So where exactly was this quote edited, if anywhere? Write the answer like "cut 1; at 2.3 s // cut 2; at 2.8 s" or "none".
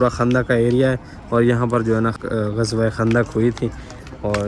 cut 1; at 2.2 s